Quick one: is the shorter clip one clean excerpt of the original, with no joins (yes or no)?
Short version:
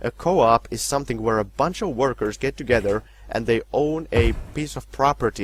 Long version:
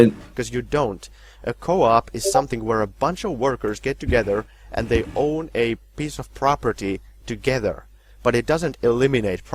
yes